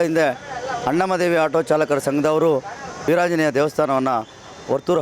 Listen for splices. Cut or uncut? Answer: cut